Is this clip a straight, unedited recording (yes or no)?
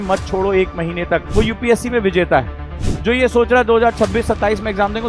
no